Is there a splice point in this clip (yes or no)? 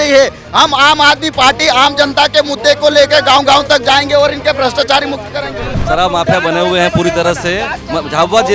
yes